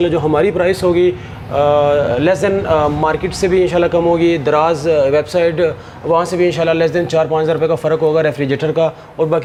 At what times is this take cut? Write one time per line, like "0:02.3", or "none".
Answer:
none